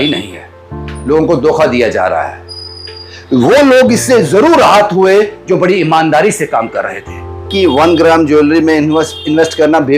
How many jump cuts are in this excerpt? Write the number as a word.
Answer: one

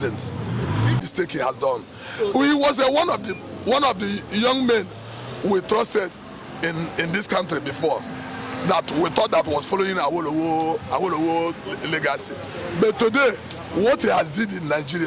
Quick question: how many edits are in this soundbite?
one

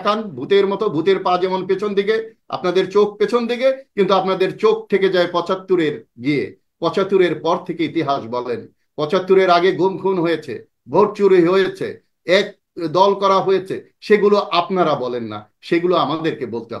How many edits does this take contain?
zero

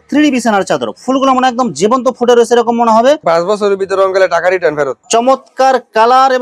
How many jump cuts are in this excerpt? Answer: two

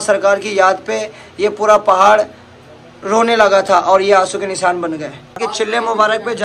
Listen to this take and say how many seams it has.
one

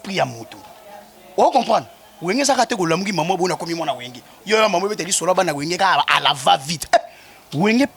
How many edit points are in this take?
zero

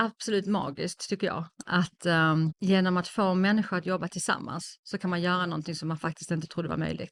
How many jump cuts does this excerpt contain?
zero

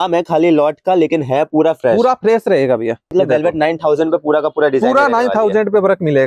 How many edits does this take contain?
one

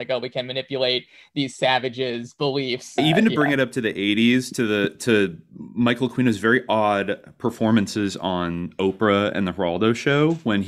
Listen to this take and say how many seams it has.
one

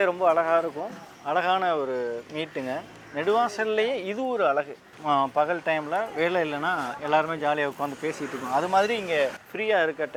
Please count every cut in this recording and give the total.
zero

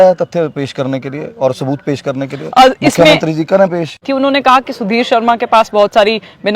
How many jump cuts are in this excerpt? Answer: one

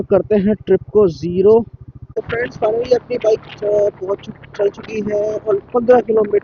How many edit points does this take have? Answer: one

